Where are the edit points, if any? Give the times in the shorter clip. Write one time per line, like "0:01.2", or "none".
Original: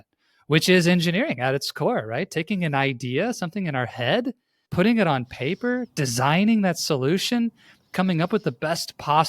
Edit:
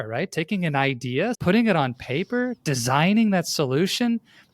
0:01.4